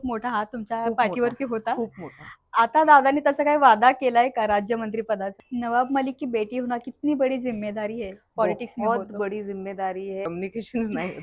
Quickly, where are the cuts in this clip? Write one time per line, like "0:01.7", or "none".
0:05.3
0:10.2